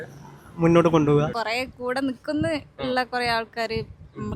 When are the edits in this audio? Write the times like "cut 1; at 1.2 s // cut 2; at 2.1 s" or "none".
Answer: cut 1; at 1.3 s